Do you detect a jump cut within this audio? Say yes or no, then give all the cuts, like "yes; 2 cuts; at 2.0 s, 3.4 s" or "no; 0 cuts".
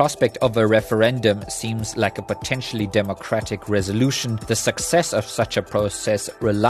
yes; 1 cut; at 4.3 s